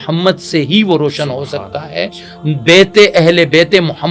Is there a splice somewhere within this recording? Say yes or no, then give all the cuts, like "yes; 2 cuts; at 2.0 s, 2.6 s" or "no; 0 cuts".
no; 0 cuts